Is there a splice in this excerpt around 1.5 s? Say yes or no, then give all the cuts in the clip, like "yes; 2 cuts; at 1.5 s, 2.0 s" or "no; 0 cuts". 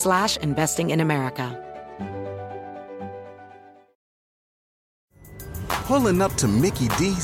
yes; 1 cut; at 1.5 s